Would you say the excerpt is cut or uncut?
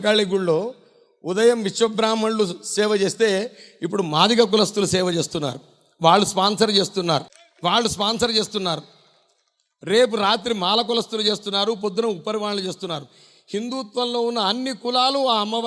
cut